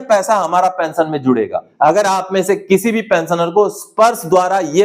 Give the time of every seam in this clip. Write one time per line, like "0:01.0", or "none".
0:01.6